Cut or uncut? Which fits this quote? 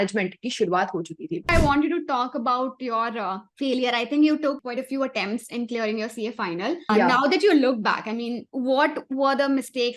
cut